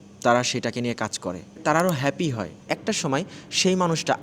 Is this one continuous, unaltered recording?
no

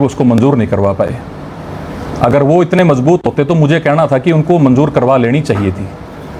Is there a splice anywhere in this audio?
no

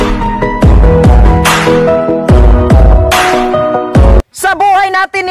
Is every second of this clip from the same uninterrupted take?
yes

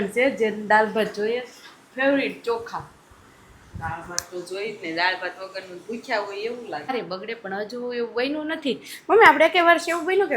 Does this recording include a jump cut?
yes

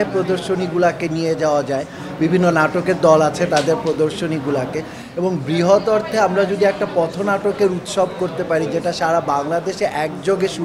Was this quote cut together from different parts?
no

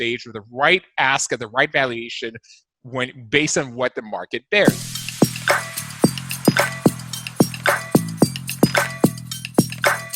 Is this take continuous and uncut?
no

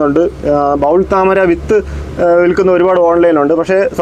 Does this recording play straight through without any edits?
yes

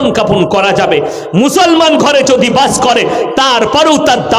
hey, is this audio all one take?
yes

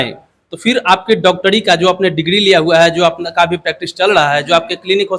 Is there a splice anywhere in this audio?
no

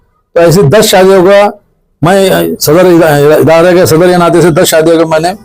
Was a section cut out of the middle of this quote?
no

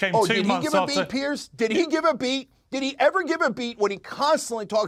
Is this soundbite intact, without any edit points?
yes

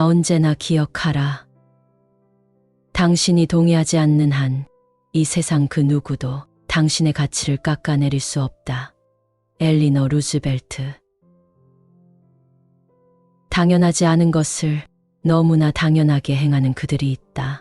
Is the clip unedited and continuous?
no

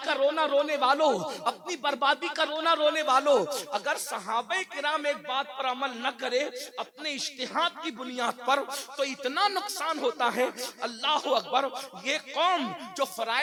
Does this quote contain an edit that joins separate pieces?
no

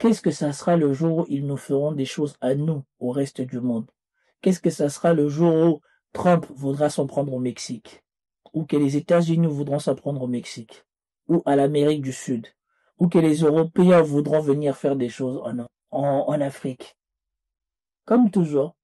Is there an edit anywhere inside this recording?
yes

